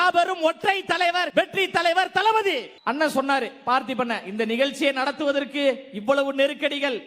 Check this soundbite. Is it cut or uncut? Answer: uncut